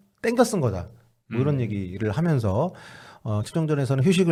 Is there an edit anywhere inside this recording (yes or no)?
no